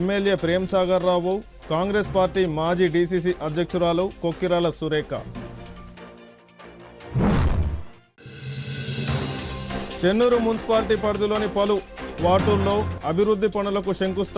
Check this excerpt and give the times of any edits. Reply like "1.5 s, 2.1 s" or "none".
none